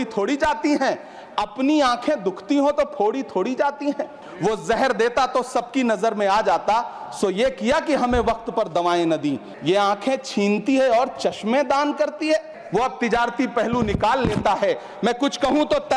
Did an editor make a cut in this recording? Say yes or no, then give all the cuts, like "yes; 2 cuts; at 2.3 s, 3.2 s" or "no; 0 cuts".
yes; 3 cuts; at 4.2 s, 9.5 s, 12.6 s